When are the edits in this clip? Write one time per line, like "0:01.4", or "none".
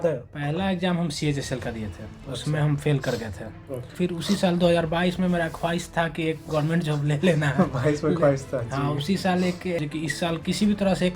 0:03.9
0:09.8